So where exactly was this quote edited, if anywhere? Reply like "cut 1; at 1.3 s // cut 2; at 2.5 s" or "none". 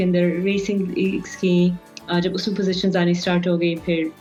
none